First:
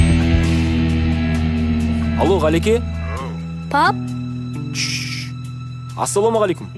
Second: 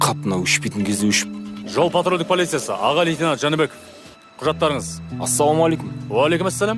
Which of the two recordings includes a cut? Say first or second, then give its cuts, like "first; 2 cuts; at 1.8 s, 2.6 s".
second; 1 cut; at 4.7 s